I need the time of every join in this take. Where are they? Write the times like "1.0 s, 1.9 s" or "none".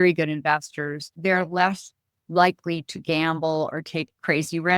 1.2 s